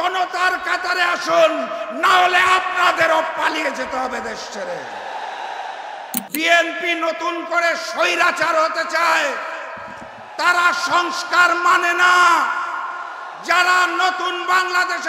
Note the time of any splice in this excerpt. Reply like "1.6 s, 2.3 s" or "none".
6.1 s